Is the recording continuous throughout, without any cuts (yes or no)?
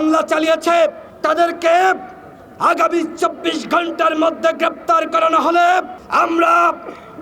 no